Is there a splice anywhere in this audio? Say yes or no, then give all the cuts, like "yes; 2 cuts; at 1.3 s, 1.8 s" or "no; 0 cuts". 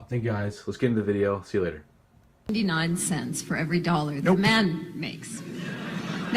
yes; 1 cut; at 2.5 s